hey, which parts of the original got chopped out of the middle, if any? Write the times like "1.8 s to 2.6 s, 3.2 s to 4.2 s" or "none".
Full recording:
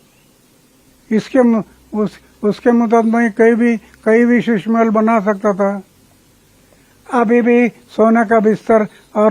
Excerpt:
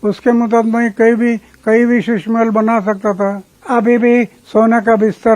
5.9 s to 6.9 s